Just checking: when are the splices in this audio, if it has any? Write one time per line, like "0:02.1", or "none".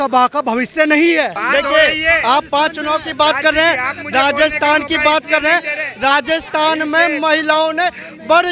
0:01.4